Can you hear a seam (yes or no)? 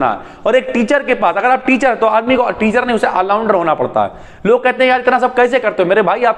no